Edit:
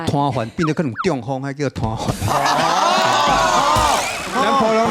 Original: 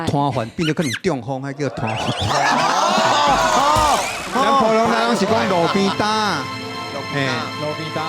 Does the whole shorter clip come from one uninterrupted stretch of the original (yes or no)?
yes